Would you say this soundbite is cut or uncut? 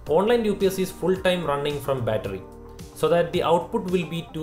uncut